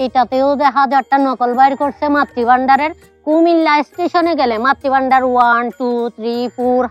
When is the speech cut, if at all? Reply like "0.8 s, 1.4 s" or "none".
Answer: none